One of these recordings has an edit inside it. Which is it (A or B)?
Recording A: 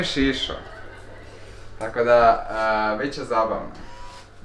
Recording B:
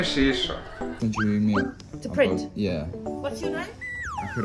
B